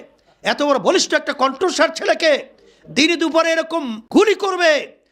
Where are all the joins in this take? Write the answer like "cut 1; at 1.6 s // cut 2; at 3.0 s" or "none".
cut 1; at 4.0 s